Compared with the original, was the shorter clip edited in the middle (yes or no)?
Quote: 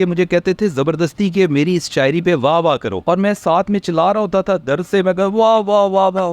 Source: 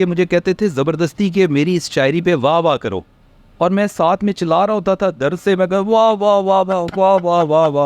yes